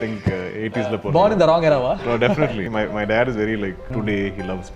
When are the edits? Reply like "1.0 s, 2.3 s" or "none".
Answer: 2.6 s, 3.9 s